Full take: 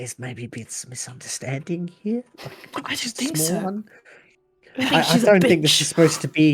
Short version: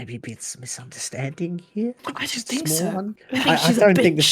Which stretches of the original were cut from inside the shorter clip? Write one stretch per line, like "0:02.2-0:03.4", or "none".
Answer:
0:02.3-0:02.7
0:03.9-0:04.7